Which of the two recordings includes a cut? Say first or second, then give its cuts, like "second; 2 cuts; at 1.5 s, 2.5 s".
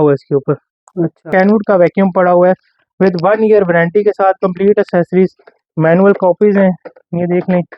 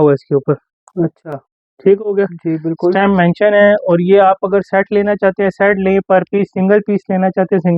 first; 1 cut; at 1.3 s